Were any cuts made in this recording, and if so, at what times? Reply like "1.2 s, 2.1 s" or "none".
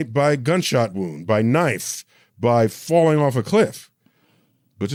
none